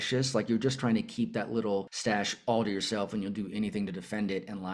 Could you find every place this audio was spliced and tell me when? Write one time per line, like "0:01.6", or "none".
0:01.9